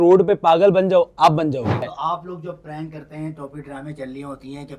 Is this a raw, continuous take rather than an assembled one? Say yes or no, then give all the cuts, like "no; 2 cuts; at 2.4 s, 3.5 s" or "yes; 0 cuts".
no; 1 cut; at 2.0 s